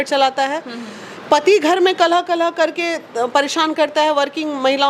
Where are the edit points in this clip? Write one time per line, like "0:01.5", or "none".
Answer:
none